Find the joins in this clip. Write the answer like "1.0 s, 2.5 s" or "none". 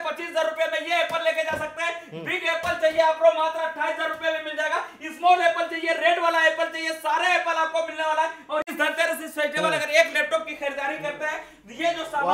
8.7 s